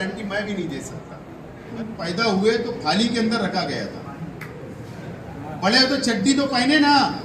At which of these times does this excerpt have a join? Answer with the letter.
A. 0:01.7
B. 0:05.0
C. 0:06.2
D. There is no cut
A